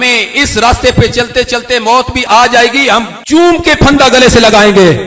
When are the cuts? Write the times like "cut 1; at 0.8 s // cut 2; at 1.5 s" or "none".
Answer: none